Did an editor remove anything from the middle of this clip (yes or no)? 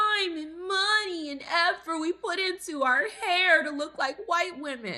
no